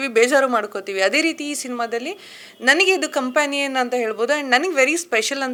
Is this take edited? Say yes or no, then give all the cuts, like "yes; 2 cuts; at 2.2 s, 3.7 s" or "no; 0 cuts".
no; 0 cuts